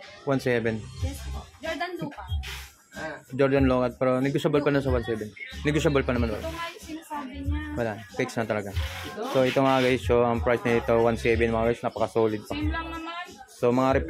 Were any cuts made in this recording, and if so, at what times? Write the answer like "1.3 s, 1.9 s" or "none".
none